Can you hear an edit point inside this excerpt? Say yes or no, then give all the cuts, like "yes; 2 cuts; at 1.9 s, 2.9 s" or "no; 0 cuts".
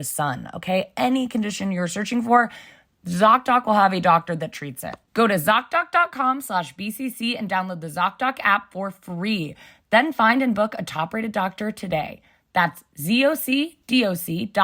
no; 0 cuts